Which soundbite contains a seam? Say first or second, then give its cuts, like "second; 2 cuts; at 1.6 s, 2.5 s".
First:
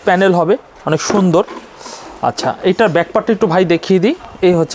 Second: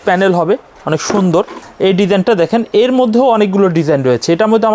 second; 1 cut; at 1.6 s